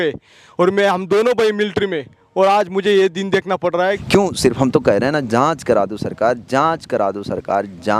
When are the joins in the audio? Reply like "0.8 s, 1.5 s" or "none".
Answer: 4.0 s